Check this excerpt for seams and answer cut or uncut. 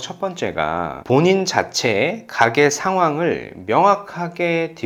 uncut